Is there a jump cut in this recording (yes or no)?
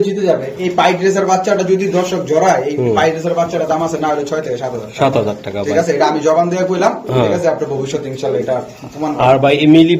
no